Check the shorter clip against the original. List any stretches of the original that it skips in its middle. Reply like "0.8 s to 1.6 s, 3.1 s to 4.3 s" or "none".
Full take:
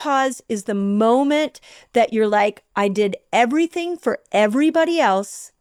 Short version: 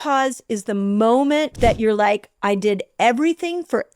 1.5 s to 1.8 s